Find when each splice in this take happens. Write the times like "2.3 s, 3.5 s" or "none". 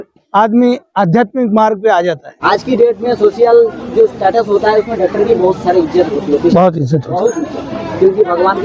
none